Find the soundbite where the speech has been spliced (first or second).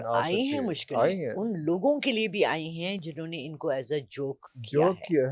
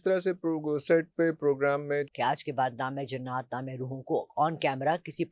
second